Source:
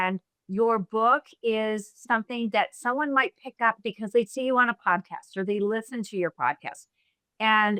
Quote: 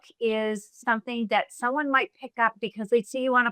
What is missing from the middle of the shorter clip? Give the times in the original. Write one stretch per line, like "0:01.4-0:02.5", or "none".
none